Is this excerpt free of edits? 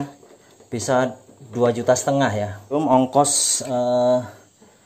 no; 1 cut; at 2.7 s

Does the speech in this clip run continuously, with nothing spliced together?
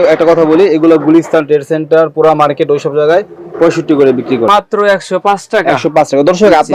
no; 1 cut; at 4.5 s

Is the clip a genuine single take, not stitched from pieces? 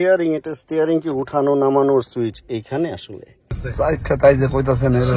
no; 1 cut; at 3.6 s

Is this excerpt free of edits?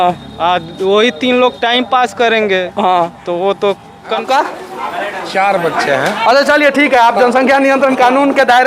no; 1 cut; at 4.2 s

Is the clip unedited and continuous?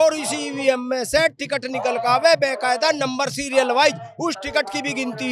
yes; 0 cuts

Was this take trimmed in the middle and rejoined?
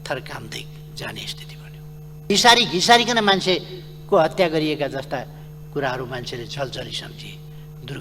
yes; 1 cut; at 2.2 s

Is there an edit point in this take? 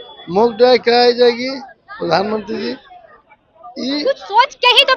no; 0 cuts

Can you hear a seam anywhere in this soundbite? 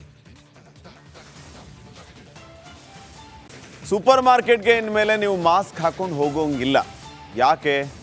yes; 1 cut; at 3.5 s

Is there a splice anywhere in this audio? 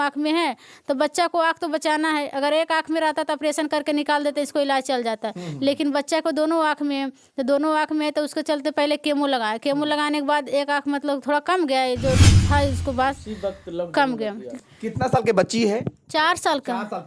yes; 1 cut; at 14.5 s

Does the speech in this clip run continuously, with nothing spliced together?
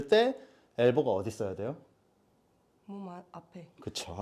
yes; 0 cuts

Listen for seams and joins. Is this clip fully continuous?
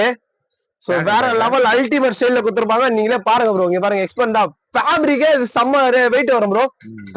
yes; 0 cuts

